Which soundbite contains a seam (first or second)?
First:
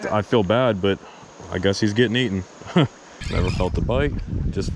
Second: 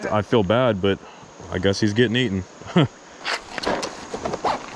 first